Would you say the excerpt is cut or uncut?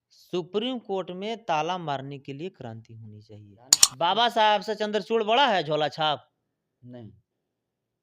cut